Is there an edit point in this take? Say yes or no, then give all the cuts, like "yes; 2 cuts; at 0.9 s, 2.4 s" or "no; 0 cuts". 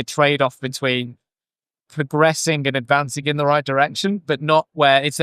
no; 0 cuts